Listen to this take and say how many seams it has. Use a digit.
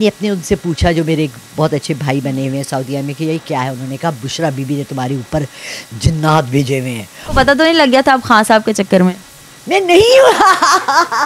1